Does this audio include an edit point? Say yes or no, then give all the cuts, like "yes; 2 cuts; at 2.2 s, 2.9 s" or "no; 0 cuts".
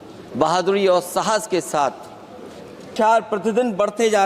yes; 1 cut; at 2.9 s